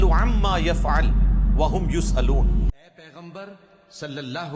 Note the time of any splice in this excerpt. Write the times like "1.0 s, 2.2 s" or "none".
2.7 s